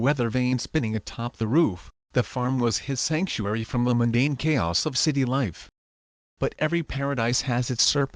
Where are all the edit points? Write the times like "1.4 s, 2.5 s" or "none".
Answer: 0.9 s, 3.8 s, 7.2 s